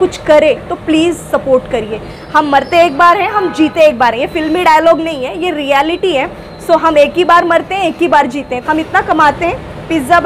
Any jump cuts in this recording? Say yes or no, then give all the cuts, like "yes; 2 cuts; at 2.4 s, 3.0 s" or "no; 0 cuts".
yes; 2 cuts; at 2.1 s, 8.5 s